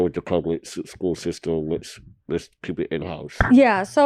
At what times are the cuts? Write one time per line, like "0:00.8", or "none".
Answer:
none